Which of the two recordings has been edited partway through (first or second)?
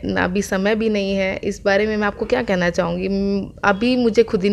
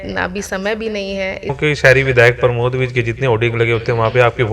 second